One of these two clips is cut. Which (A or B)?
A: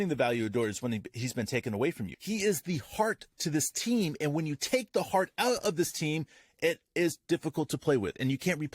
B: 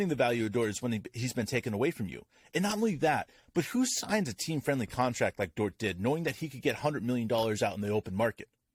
A